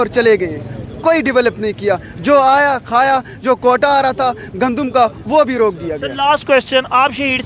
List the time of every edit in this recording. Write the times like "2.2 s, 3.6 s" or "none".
none

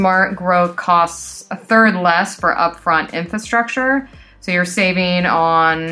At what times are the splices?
none

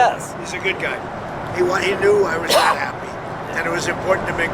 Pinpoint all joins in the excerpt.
none

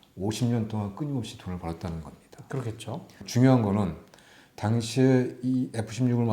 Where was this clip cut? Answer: 3.2 s

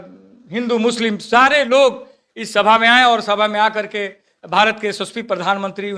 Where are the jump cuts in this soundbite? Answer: none

